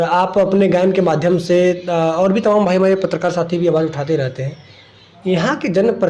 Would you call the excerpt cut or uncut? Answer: uncut